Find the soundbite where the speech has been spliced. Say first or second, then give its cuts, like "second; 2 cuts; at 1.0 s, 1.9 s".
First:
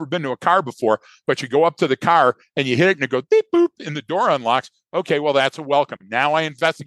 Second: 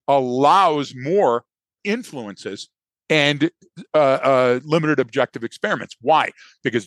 second; 1 cut; at 1.8 s